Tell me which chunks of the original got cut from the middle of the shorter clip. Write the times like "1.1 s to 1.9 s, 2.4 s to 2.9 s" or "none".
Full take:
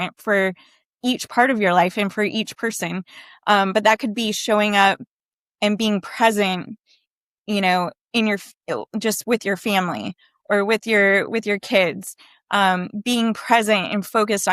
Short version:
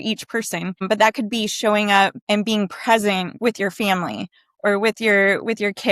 3.1 s to 3.7 s, 5.0 s to 5.5 s, 6.7 s to 9.2 s

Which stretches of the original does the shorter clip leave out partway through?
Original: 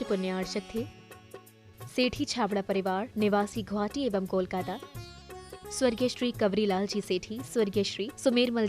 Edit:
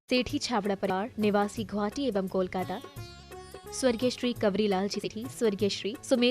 2.8 s to 2.9 s, 7.0 s to 7.2 s

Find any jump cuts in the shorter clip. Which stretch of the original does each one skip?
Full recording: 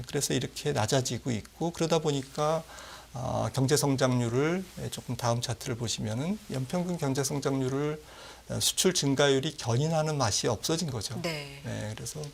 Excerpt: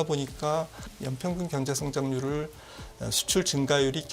3.0 s to 6.5 s

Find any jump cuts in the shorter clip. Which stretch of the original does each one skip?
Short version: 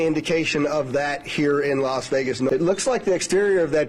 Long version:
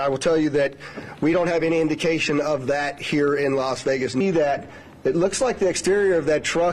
4.2 s to 5.0 s

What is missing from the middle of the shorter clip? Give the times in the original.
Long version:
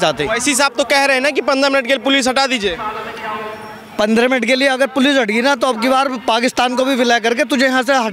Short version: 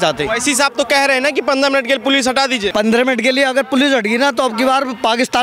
2.7 s to 3.9 s

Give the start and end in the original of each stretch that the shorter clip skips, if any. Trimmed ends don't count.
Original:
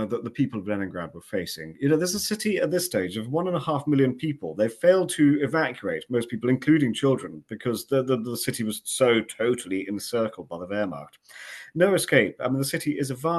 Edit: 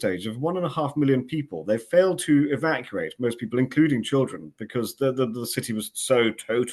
none

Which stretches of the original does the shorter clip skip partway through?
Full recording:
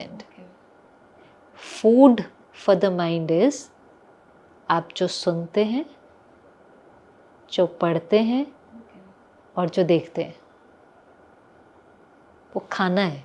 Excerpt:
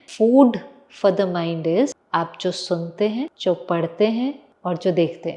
3.6 s to 4.6 s, 5.9 s to 7.5 s, 8.6 s to 9.4 s

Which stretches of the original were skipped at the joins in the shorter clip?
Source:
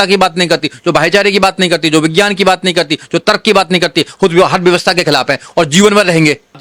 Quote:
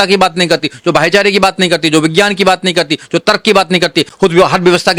none

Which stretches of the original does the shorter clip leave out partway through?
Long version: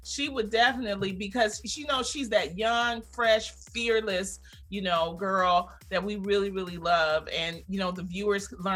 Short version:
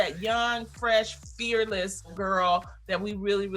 4.5 s to 5.2 s

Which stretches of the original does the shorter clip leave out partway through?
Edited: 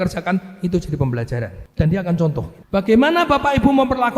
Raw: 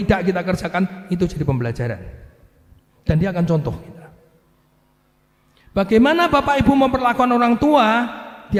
2.1 s to 2.9 s, 3.9 s to 5.6 s

